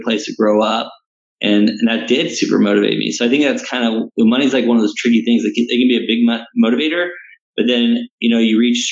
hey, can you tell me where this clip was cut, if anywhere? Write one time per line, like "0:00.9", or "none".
none